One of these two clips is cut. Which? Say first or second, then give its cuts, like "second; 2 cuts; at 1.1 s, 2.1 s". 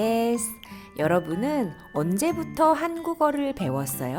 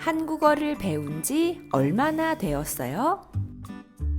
second; 1 cut; at 3.3 s